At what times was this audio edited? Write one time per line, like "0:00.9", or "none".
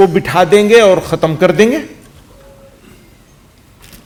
none